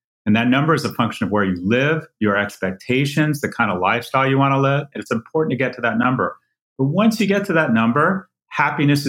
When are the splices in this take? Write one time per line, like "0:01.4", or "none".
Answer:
0:04.9